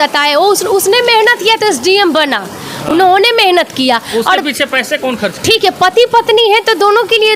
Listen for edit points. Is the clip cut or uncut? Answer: uncut